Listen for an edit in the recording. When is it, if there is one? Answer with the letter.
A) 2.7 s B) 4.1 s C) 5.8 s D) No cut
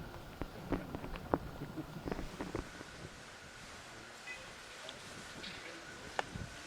A